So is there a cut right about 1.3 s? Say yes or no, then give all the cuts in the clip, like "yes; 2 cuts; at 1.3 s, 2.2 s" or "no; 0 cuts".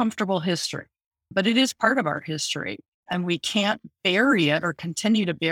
yes; 2 cuts; at 1.3 s, 3.0 s